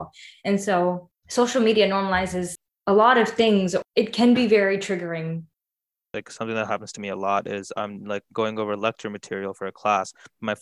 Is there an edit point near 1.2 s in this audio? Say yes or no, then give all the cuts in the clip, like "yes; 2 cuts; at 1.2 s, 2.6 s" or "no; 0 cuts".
no; 1 cut; at 5.8 s